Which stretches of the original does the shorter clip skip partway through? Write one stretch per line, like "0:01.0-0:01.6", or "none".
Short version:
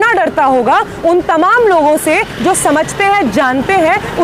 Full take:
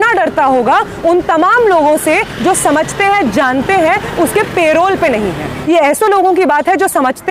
none

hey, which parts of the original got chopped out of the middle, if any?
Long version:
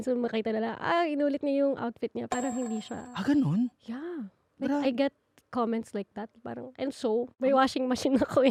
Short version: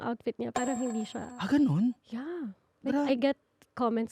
none

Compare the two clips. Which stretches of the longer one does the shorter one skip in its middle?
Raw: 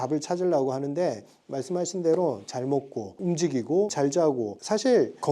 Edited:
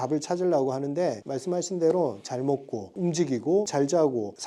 0:01.3-0:01.5

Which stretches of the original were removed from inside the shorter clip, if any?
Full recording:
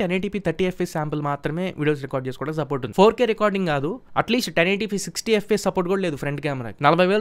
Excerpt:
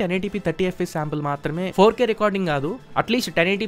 0:01.7-0:02.9

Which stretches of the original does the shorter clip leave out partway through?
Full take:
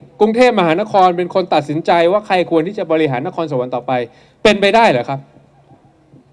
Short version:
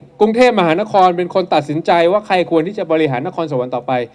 none

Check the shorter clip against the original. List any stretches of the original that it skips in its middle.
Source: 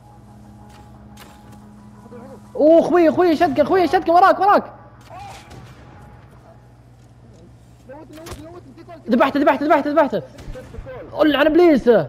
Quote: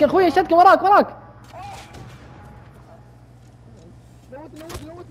none

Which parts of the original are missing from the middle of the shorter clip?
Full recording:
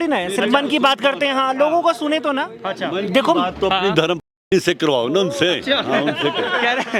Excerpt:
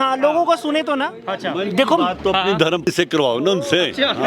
0:04.3-0:04.6

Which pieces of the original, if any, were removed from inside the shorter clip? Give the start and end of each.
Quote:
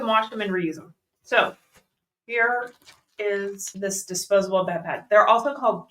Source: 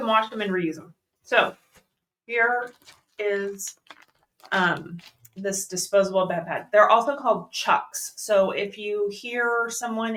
0:03.7-0:05.3

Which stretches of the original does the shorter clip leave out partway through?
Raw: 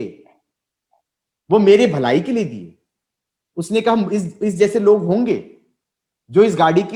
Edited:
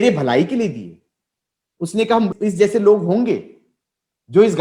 0:04.1-0:04.3

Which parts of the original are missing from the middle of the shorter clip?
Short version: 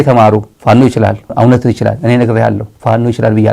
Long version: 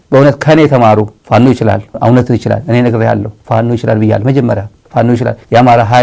none

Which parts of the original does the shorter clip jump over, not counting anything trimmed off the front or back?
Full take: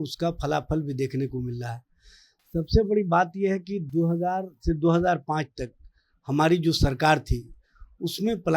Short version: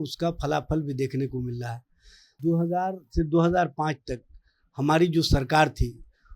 0:02.3-0:03.8

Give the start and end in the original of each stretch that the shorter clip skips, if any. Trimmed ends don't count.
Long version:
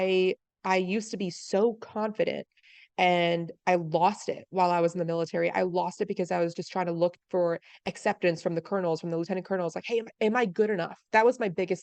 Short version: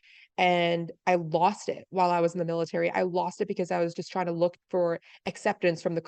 none

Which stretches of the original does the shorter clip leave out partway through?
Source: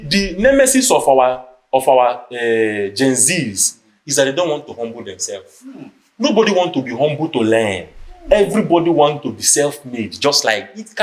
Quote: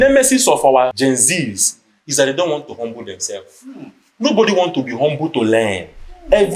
0:01.4-0:02.9

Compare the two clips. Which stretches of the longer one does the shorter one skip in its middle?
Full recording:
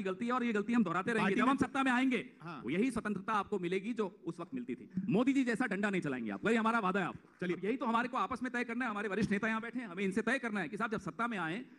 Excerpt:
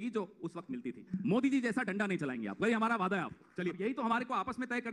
none

